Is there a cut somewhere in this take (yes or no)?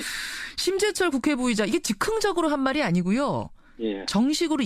yes